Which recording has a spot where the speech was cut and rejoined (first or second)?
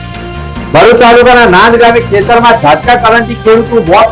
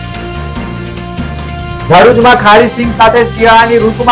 second